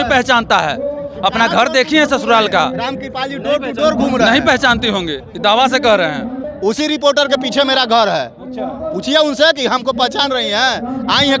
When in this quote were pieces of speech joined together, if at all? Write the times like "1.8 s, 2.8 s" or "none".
6.4 s